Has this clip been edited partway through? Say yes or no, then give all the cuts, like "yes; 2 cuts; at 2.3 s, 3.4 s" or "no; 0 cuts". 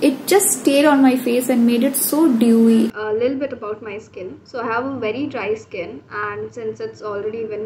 yes; 1 cut; at 2.9 s